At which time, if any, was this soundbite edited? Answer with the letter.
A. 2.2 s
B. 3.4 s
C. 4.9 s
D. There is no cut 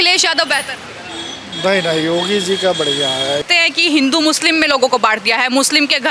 B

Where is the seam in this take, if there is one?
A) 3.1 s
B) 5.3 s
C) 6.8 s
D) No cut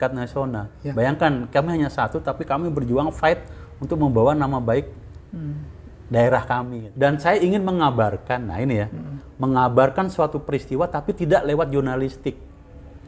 C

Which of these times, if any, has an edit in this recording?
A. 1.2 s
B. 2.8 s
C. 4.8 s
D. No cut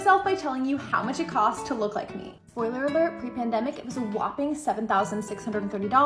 D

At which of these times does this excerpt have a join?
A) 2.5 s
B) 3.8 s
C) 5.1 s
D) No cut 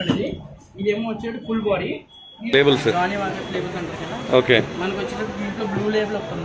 A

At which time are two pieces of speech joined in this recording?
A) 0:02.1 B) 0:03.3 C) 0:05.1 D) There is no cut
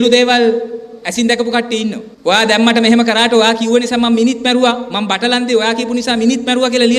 A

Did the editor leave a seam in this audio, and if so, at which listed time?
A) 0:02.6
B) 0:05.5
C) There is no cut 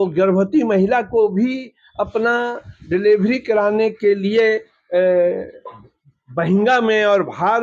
C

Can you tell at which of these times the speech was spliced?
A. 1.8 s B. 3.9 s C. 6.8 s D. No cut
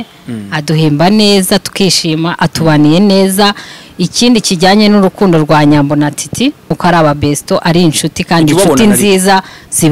C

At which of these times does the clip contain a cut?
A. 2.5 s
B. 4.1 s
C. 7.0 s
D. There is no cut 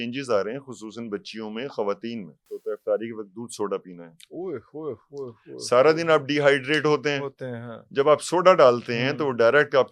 A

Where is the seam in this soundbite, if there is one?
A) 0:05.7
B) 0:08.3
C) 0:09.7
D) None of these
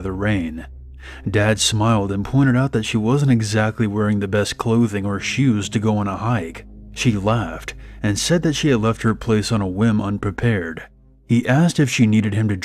A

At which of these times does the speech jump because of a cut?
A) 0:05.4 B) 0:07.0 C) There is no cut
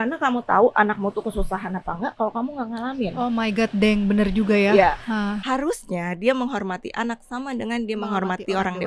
A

